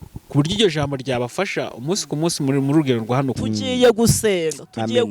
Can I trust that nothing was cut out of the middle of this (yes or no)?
no